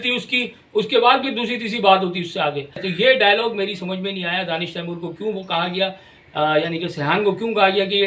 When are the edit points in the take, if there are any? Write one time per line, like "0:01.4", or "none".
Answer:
0:02.9